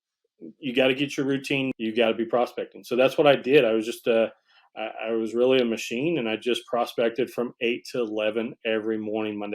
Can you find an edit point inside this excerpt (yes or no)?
yes